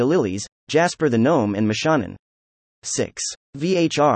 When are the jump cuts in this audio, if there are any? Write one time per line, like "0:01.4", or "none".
0:02.9